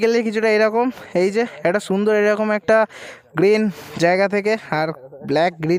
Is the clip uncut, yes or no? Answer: yes